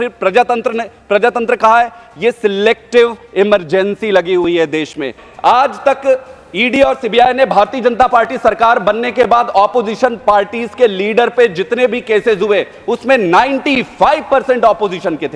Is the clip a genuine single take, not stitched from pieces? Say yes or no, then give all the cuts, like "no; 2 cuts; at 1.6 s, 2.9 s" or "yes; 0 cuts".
no; 1 cut; at 5.1 s